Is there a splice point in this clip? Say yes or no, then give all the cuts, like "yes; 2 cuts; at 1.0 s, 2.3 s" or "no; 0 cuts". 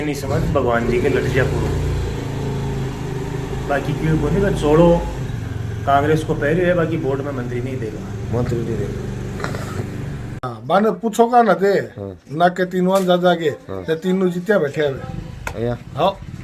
yes; 1 cut; at 10.5 s